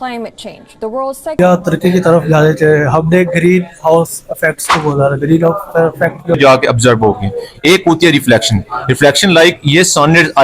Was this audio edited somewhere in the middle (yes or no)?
yes